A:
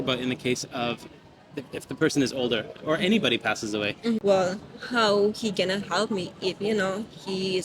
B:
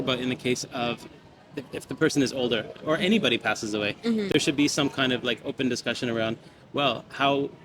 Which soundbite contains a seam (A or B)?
A